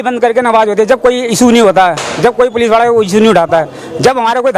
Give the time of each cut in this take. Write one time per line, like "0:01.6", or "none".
none